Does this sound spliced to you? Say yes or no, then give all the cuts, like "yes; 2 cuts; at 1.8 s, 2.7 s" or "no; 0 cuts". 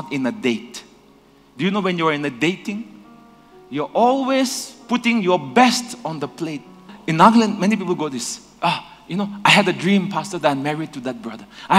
yes; 1 cut; at 6.9 s